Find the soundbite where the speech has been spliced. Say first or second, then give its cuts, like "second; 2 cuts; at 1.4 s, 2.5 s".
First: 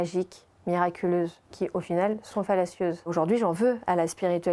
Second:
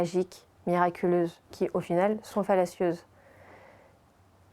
first; 1 cut; at 3.1 s